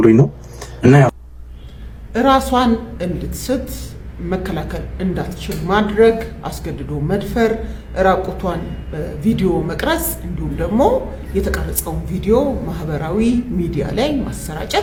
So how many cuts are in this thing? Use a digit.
0